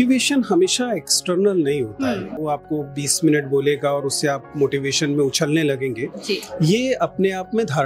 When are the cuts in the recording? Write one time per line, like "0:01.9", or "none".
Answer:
0:02.3